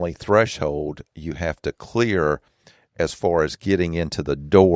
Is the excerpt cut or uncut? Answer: uncut